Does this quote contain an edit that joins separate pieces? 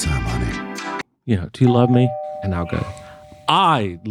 yes; 1 cut; at 1.1 s

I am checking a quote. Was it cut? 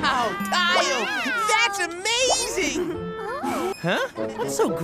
yes; 1 cut; at 3.7 s

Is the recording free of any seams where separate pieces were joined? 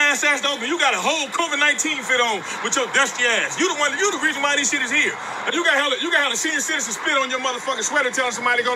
yes; 0 cuts

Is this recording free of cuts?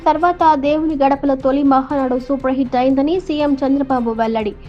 yes; 0 cuts

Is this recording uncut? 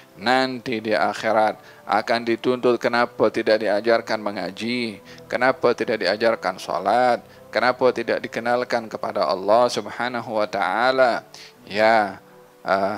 yes; 0 cuts

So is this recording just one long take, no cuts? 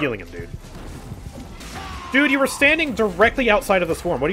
no; 1 cut; at 1.6 s

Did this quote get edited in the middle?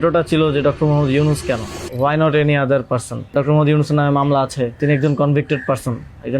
yes; 3 cuts; at 1.8 s, 3.3 s, 4.8 s

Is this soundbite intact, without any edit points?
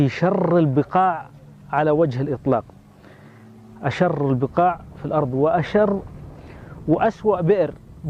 yes; 0 cuts

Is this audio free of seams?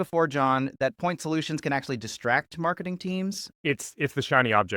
no; 1 cut; at 3.5 s

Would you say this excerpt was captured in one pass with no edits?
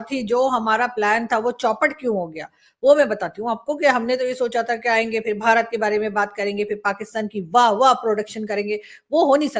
yes; 0 cuts

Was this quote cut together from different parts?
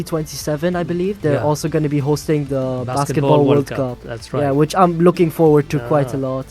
no; 0 cuts

